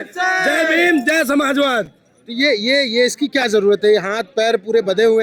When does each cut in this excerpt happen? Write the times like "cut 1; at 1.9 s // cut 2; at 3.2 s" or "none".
none

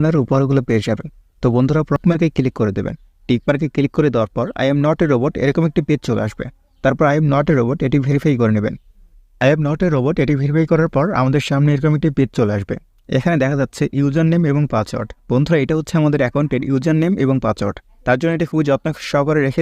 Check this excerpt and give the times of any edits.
cut 1; at 2.0 s

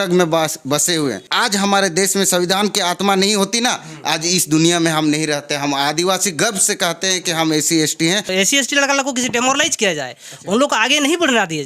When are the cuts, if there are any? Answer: cut 1; at 1.3 s // cut 2; at 8.3 s

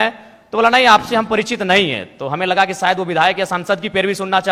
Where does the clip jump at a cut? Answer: none

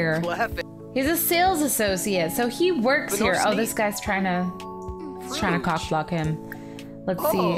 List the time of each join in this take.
none

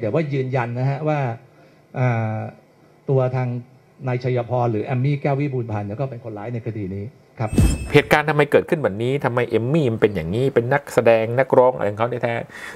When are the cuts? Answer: cut 1; at 7.9 s

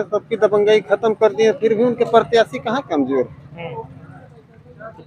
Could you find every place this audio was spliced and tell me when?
none

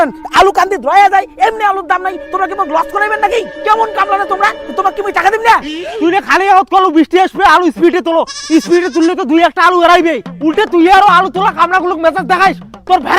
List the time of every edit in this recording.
none

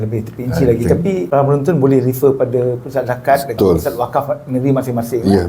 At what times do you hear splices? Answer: cut 1; at 1.3 s // cut 2; at 3.6 s

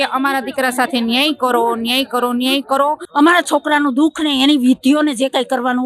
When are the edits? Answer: cut 1; at 3.0 s

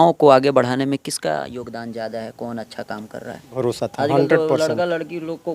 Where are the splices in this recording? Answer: cut 1; at 3.5 s

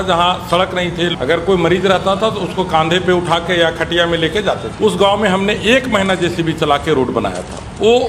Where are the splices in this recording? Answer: cut 1; at 1.1 s // cut 2; at 4.7 s

